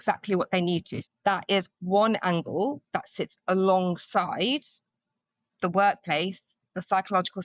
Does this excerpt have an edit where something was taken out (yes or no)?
yes